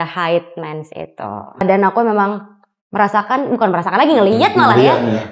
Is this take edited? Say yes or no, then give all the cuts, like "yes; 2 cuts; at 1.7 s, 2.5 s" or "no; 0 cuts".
yes; 1 cut; at 1.6 s